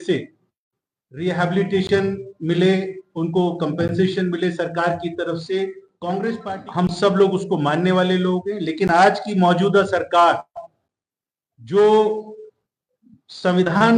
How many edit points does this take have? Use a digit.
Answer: 1